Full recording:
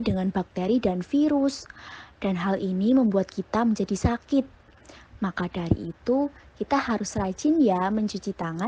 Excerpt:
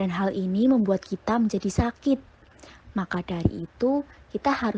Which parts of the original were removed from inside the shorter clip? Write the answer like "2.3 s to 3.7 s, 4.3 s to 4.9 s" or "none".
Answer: none